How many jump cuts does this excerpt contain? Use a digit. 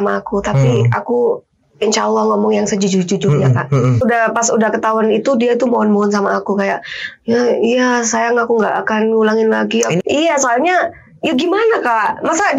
2